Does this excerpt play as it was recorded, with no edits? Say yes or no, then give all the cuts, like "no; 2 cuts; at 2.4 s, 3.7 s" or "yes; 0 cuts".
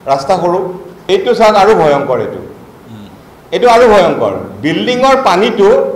no; 1 cut; at 0.9 s